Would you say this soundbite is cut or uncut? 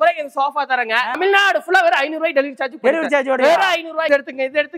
cut